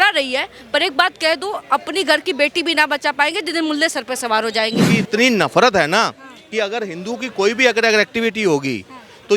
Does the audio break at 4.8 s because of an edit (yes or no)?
yes